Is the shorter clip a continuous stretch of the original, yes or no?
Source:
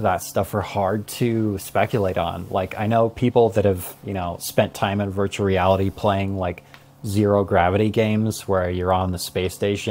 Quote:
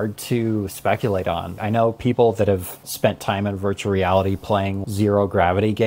no